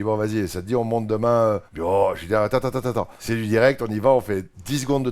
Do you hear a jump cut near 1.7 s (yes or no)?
yes